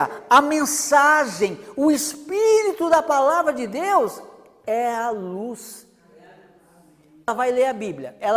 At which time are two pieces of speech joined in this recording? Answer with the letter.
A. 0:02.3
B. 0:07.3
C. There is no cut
B